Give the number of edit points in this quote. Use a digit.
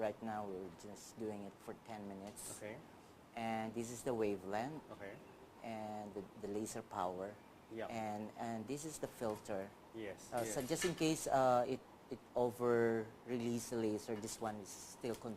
1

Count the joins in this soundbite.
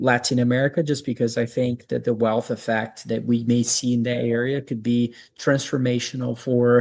0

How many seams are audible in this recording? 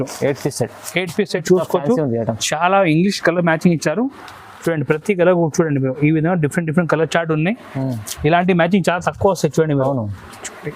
1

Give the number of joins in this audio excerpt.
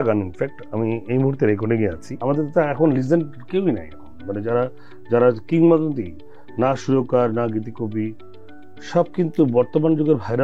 1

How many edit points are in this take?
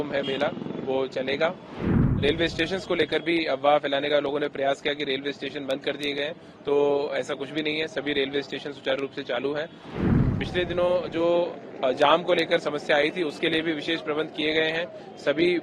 2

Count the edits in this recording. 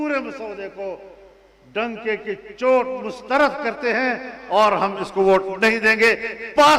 0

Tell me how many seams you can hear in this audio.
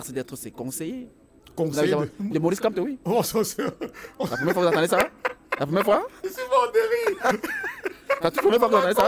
0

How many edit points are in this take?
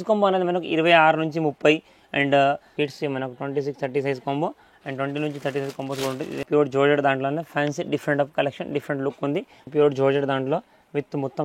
3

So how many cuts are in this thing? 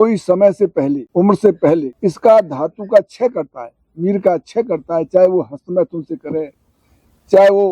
2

